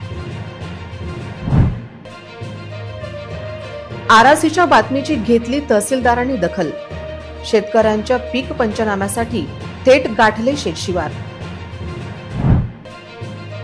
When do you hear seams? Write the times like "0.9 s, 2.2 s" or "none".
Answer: 1.3 s

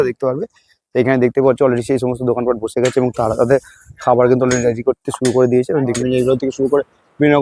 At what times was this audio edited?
6.0 s

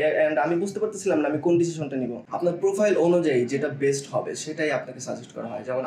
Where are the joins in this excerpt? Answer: 2.2 s

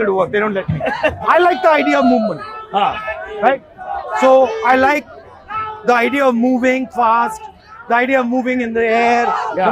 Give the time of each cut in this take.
1.2 s

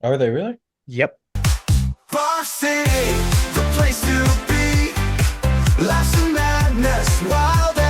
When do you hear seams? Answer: 1.3 s

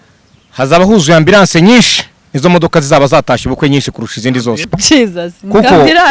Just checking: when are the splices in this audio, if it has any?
4.7 s

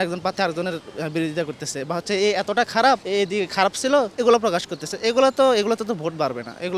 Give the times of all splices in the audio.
3.0 s, 4.1 s

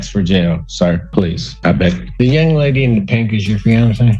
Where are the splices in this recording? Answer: 1.0 s

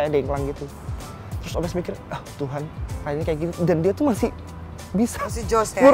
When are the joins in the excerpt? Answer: none

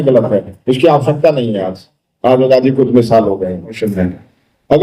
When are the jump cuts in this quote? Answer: 3.7 s

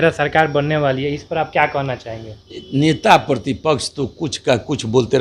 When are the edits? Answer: none

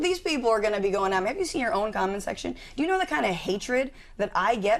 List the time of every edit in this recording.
none

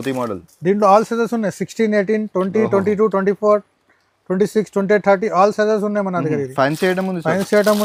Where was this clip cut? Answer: none

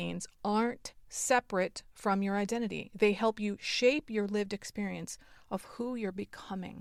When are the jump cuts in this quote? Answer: none

